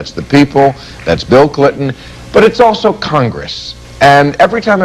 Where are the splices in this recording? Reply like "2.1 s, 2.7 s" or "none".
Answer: 2.2 s